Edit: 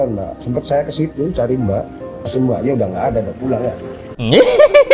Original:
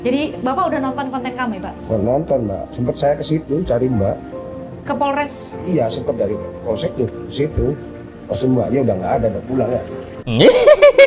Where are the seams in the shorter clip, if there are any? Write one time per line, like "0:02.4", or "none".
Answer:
0:02.2